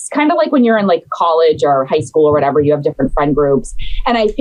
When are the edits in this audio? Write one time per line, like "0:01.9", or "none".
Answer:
none